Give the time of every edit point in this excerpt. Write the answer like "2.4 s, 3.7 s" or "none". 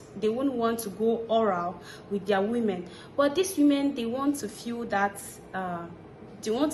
none